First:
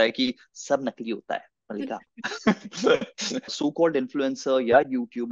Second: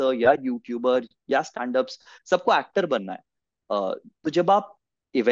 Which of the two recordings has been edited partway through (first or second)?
first